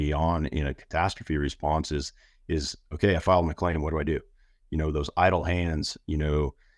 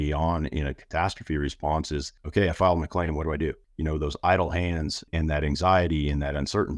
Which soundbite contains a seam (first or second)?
second